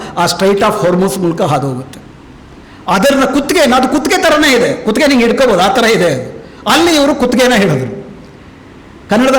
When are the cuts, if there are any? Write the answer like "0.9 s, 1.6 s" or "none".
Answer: none